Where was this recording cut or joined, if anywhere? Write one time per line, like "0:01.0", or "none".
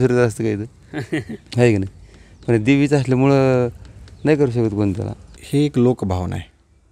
0:05.4